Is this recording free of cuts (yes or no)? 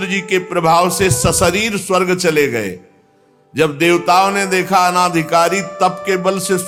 yes